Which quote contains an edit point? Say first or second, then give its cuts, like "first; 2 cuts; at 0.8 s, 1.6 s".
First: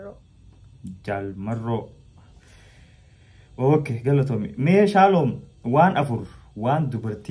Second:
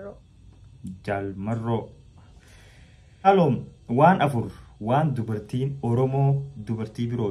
second; 1 cut; at 3.3 s